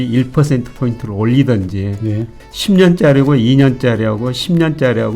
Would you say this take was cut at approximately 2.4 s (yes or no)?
yes